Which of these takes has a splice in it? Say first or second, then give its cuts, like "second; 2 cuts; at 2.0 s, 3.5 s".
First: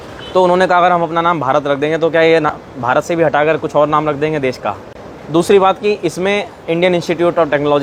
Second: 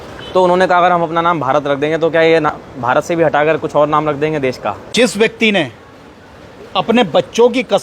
second; 1 cut; at 4.8 s